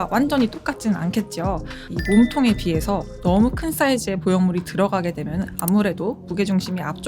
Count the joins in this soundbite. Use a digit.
1